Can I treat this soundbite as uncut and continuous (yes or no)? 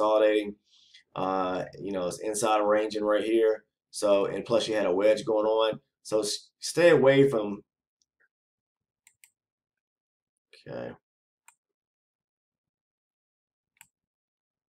no